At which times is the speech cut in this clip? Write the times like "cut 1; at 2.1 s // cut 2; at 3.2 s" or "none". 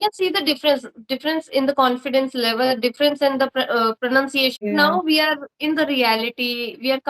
cut 1; at 4.6 s